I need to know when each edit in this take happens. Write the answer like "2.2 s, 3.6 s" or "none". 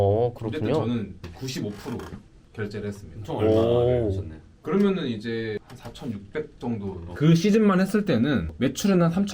7.1 s